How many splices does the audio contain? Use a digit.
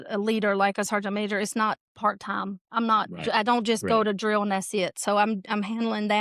0